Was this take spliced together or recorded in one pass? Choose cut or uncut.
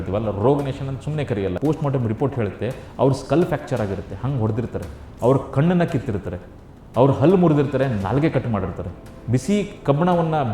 cut